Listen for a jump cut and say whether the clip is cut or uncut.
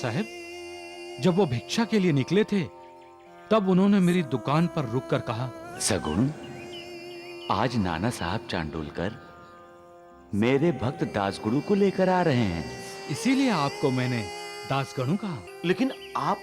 cut